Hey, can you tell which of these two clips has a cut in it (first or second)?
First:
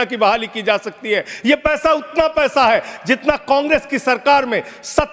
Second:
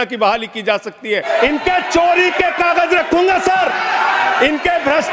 second